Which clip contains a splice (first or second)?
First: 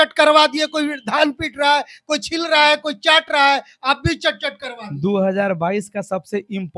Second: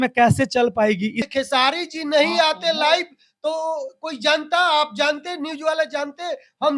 second